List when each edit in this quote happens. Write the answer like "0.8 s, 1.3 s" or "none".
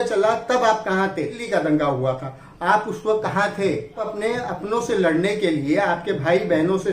1.4 s, 4.1 s